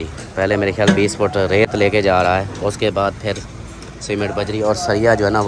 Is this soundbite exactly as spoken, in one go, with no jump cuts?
yes; 0 cuts

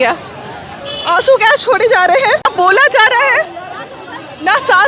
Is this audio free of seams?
no; 1 cut; at 2.5 s

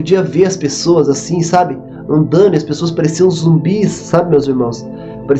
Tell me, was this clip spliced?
no; 0 cuts

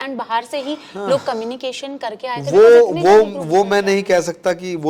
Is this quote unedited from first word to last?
yes; 0 cuts

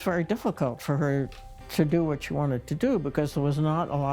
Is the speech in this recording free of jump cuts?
yes; 0 cuts

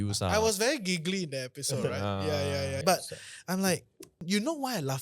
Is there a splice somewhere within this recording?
yes; 2 cuts; at 2.8 s, 4.2 s

